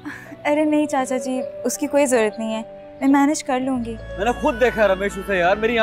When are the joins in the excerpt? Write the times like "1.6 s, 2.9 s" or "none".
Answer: 4.0 s